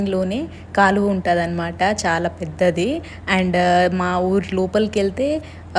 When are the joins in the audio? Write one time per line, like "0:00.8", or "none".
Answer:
none